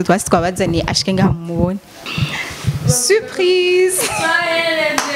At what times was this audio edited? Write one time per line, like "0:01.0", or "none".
0:02.0

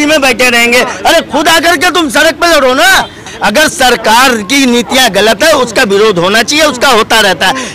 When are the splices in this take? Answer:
0:03.2

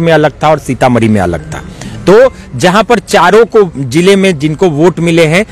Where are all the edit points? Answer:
none

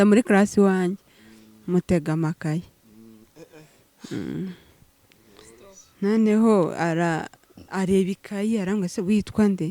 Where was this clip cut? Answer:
none

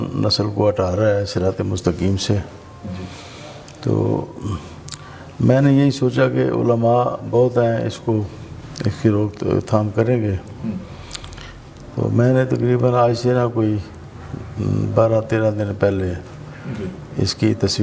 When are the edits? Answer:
none

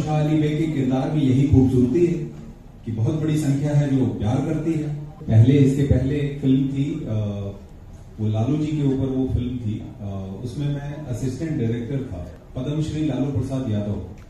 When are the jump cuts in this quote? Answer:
0:05.2
0:12.2

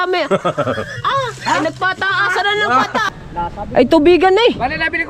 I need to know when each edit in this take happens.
0:03.1

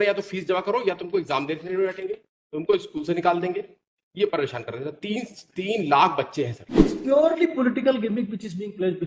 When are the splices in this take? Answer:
0:06.6

